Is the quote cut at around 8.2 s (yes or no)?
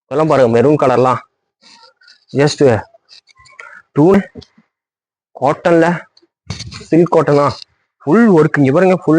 no